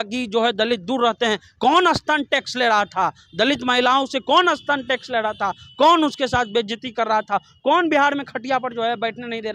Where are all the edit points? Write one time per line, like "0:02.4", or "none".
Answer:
none